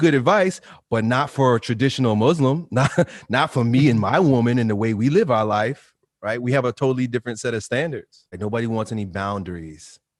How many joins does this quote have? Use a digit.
1